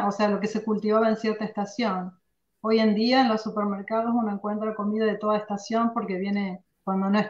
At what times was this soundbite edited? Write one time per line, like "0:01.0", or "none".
none

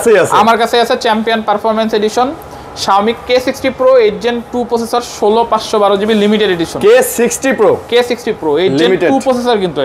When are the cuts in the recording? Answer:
none

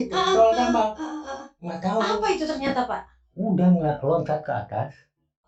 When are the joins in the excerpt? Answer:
none

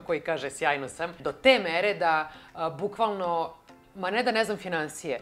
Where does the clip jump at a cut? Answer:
0:01.2

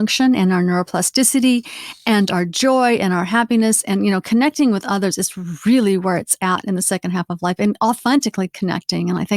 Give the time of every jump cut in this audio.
0:08.0

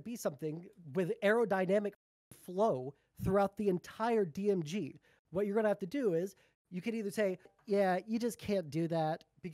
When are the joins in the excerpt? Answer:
0:07.6

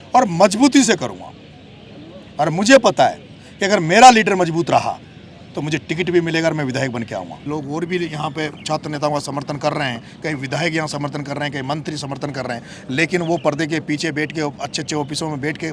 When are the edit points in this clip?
0:07.5

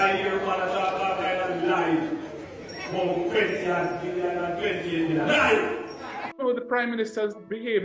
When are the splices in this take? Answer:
0:06.3

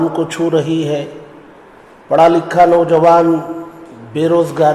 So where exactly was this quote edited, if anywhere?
none

